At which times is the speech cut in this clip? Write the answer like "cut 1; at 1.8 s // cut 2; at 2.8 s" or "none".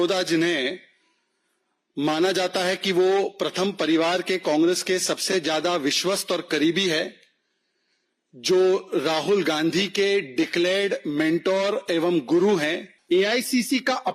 cut 1; at 12.9 s